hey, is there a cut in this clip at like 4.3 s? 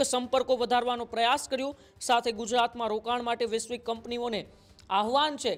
no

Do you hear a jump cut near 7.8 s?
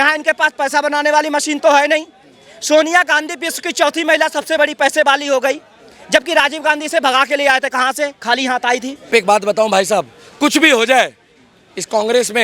no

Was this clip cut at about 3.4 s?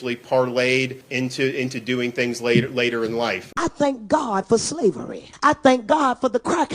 yes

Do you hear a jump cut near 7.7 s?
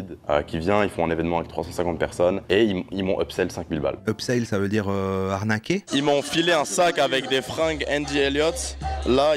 no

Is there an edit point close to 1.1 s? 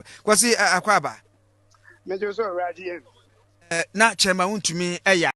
no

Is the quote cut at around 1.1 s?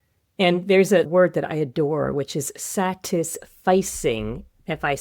yes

